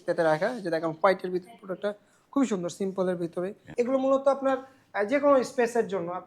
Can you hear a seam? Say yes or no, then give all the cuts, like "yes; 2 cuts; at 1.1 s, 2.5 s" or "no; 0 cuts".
yes; 1 cut; at 3.6 s